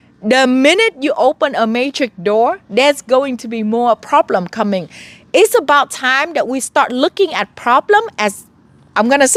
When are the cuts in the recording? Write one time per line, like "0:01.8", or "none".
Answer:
none